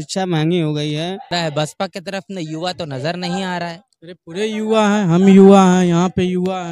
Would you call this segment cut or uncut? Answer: cut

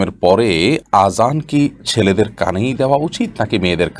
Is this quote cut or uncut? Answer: uncut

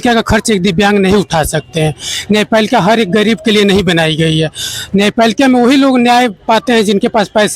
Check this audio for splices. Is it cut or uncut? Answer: uncut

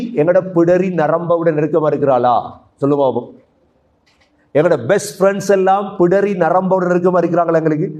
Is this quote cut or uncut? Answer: uncut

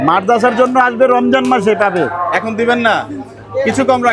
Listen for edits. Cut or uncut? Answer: uncut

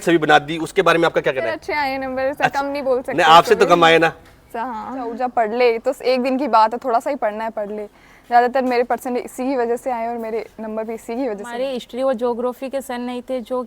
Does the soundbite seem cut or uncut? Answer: cut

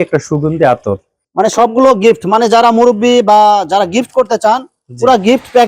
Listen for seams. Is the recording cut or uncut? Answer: uncut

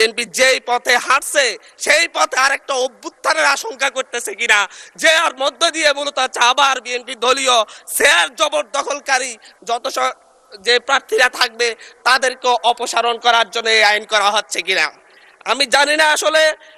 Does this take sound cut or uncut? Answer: uncut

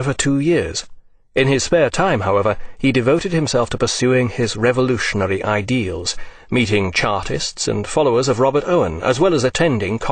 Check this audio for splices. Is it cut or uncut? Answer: cut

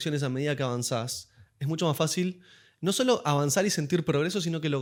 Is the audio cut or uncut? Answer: uncut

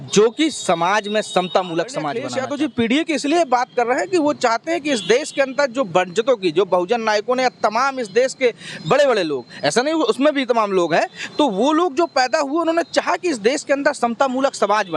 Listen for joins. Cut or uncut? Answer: cut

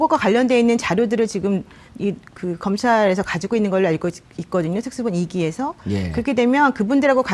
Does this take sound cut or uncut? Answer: uncut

